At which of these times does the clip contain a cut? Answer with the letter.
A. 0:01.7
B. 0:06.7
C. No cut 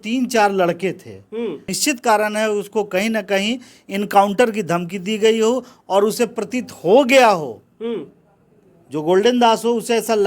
A